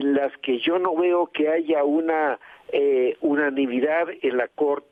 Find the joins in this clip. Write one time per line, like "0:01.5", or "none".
none